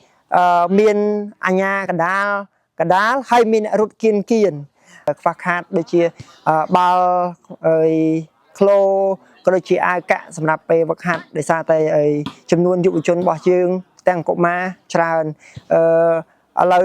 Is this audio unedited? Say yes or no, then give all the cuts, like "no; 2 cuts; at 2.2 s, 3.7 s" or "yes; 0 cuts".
no; 1 cut; at 5.1 s